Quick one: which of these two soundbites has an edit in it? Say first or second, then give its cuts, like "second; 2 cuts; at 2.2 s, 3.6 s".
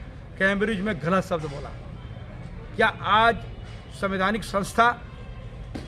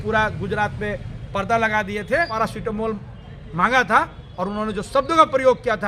second; 1 cut; at 2.3 s